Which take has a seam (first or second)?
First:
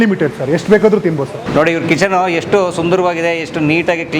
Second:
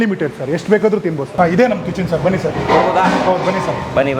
first